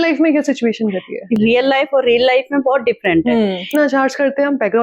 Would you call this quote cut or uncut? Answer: cut